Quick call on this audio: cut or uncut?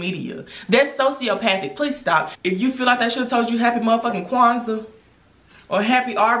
cut